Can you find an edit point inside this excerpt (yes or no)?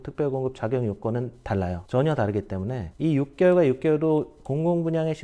yes